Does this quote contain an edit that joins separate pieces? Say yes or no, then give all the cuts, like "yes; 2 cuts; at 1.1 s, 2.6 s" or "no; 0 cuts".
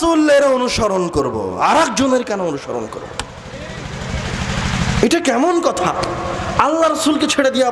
no; 0 cuts